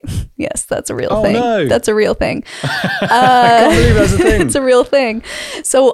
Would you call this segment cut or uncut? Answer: uncut